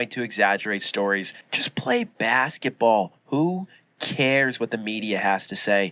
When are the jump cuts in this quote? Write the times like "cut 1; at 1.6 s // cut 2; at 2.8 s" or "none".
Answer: cut 1; at 1.4 s